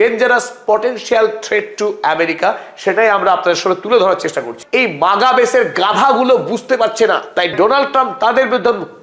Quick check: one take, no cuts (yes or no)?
no